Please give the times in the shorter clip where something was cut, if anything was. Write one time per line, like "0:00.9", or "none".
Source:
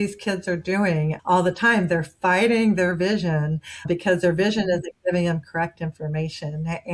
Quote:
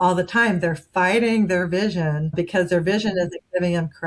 0:02.2